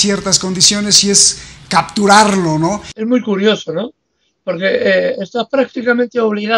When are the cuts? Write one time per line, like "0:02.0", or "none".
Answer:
0:02.9